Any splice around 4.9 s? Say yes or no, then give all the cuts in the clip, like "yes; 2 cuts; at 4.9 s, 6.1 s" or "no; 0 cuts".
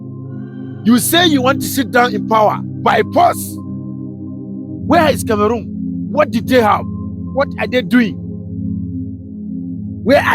yes; 2 cuts; at 3.4 s, 4.9 s